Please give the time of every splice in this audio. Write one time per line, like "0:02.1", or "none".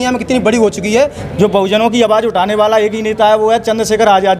0:01.2